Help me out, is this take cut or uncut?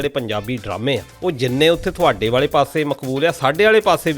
cut